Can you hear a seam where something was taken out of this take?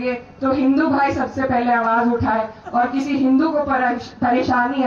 no; 0 cuts

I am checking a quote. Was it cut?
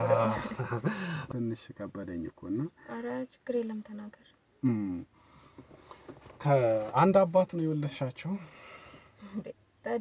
yes; 1 cut; at 1.2 s

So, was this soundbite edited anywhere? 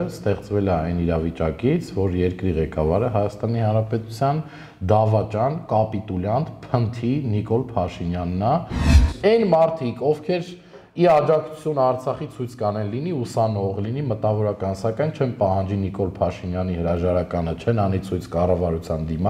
yes; 1 cut; at 9.0 s

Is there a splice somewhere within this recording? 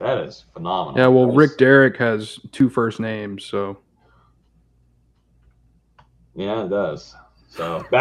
no; 0 cuts

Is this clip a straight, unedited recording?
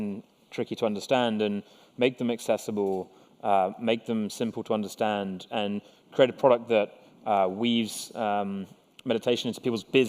no; 1 cut; at 8.6 s

